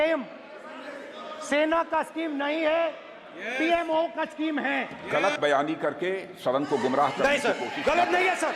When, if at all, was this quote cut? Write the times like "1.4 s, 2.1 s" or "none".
5.0 s